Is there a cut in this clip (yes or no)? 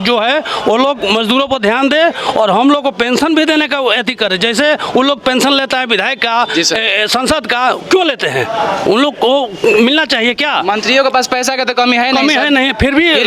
no